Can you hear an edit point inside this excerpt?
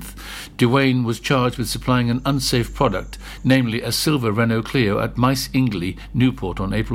no; 0 cuts

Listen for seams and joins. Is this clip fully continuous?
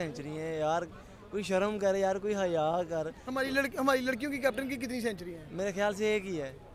yes; 0 cuts

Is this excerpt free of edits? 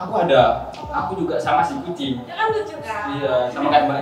no; 1 cut; at 2.3 s

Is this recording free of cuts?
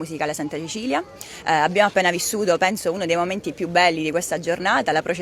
yes; 0 cuts

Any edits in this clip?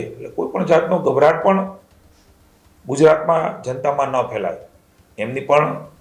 no; 0 cuts

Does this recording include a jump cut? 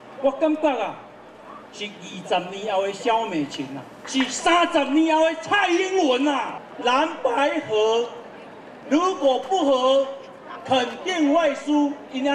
yes; 2 cuts; at 3.9 s, 6.5 s

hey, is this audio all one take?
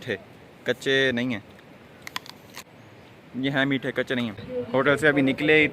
no; 1 cut; at 4.5 s

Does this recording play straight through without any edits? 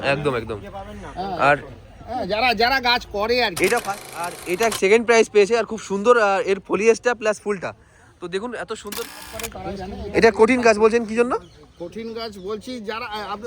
no; 2 cuts; at 4.1 s, 9.2 s

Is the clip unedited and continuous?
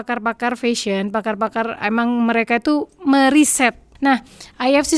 no; 1 cut; at 3.9 s

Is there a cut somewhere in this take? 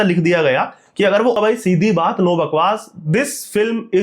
yes; 1 cut; at 1.4 s

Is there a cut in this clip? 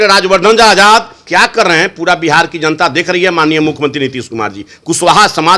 yes; 1 cut; at 1.2 s

